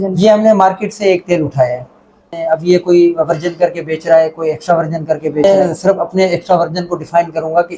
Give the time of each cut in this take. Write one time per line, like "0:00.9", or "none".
0:02.3
0:05.4

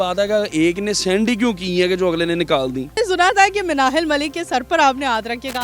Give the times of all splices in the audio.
0:02.9

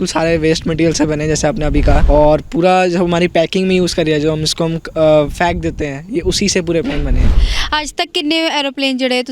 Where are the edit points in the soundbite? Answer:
0:02.0
0:07.5

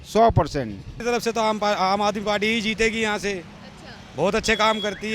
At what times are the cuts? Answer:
0:00.9

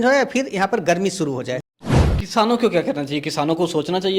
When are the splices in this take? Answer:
0:01.7

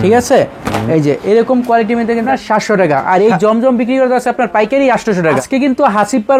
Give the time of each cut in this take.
0:02.2
0:05.4

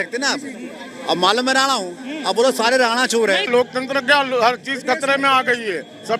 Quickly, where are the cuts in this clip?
0:03.5

